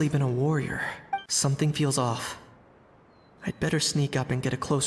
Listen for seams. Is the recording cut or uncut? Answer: cut